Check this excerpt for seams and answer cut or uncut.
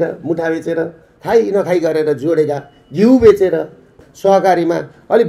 cut